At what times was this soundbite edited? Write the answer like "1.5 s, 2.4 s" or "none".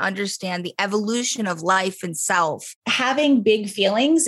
2.8 s